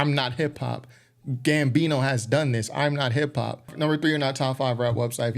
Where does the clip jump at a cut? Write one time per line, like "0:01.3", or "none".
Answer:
0:03.7